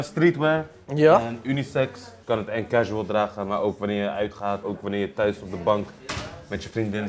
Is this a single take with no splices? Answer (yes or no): no